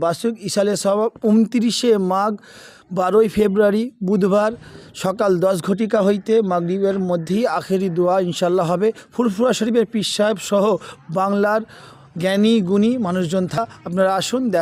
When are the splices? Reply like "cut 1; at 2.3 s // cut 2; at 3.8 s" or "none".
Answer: cut 1; at 9.1 s // cut 2; at 13.6 s